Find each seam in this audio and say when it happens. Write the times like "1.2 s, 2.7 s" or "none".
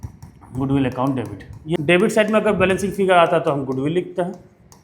1.7 s